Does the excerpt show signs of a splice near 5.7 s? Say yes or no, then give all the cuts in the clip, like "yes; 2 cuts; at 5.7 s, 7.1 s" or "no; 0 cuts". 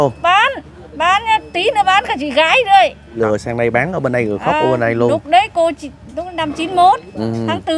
no; 1 cut; at 3.2 s